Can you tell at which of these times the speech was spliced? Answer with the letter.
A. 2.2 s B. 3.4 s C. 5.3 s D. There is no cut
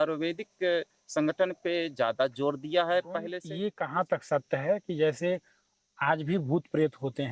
B